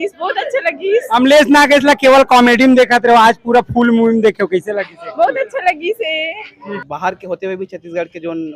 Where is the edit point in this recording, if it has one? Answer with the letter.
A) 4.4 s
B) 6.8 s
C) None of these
B